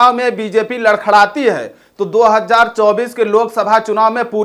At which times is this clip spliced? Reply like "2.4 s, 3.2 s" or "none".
none

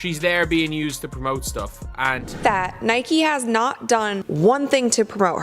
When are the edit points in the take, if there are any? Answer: 2.3 s

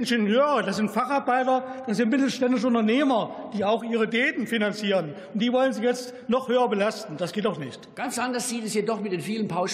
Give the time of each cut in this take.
7.9 s

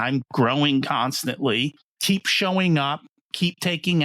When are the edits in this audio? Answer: 1.9 s

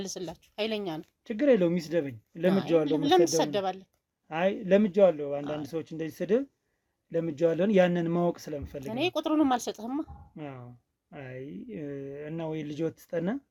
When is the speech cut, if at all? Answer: none

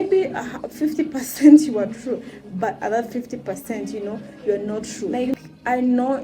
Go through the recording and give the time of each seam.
5.1 s

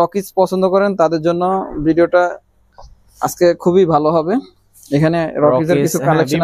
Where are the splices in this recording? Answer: none

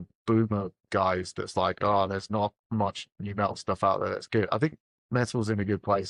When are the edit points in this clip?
none

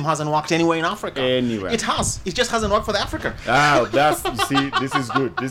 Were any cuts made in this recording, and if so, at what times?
none

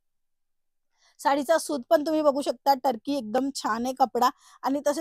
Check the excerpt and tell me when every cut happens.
none

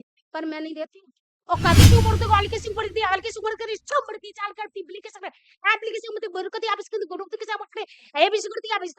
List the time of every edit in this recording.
1.8 s

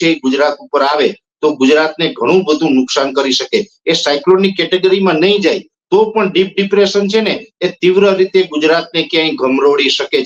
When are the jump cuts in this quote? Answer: none

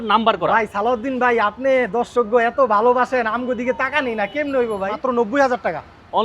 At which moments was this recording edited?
4.9 s

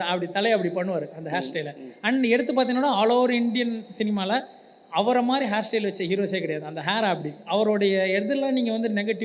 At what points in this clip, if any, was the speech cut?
7.4 s

